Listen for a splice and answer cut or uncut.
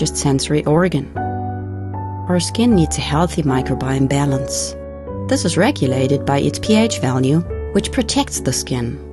uncut